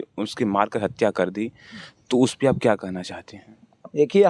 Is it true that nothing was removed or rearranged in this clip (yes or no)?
yes